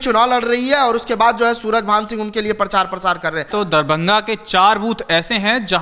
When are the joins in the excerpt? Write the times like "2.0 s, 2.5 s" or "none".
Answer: 3.5 s